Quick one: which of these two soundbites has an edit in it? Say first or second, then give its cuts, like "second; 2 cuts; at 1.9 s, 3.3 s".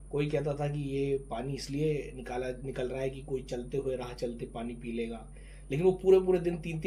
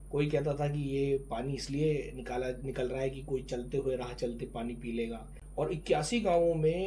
second; 1 cut; at 5.3 s